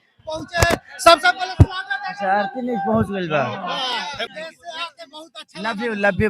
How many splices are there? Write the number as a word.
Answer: one